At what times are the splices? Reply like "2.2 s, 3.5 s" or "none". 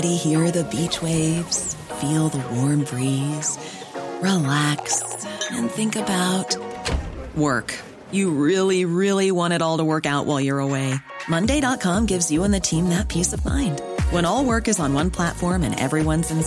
none